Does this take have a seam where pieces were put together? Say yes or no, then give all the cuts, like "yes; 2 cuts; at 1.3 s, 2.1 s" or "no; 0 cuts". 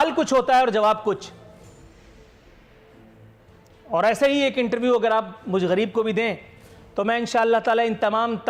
no; 0 cuts